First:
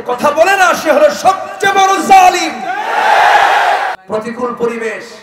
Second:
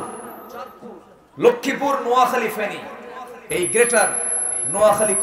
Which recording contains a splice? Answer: first; 1 cut; at 4.0 s

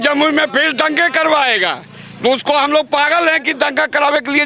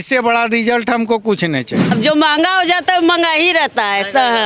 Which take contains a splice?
second; 1 cut; at 1.9 s

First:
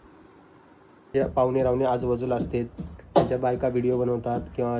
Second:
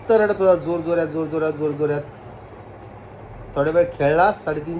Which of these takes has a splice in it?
first; 1 cut; at 1.1 s

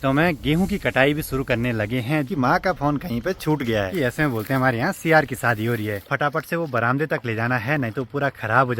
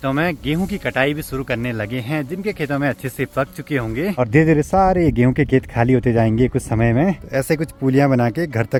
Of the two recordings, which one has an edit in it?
first; 3 cuts; at 2.3 s, 3.9 s, 6.1 s

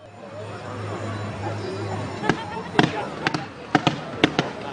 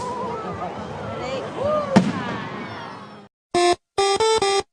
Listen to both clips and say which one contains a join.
first; 1 cut; at 2.2 s

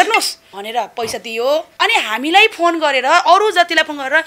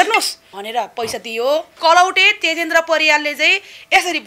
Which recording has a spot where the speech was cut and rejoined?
first; 1 cut; at 1.7 s

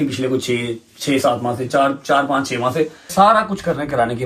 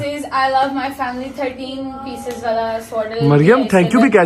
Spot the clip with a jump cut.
first; 1 cut; at 3.1 s

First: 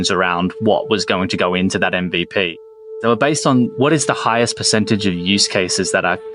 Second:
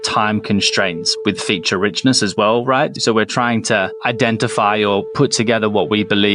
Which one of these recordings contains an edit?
first; 1 cut; at 2.9 s

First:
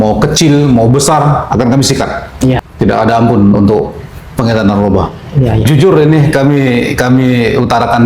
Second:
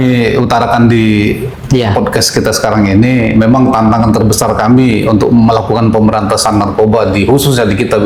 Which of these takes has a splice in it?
first; 2 cuts; at 2.6 s, 5.7 s

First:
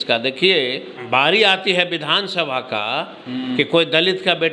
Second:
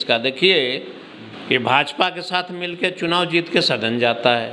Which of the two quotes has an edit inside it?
first; 1 cut; at 1.0 s

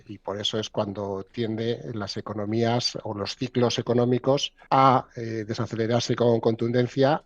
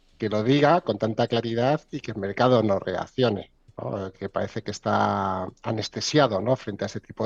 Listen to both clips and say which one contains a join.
first; 1 cut; at 4.5 s

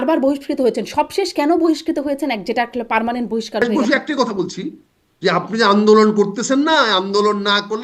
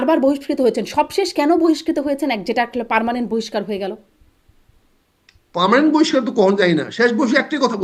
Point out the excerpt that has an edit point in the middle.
first; 1 cut; at 3.6 s

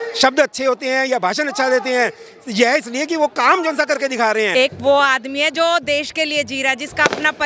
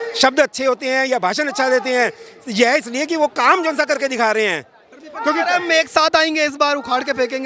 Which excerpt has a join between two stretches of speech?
first; 1 cut; at 4.5 s

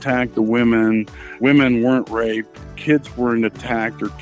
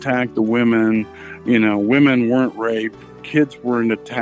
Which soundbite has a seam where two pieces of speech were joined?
first; 1 cut; at 1.4 s

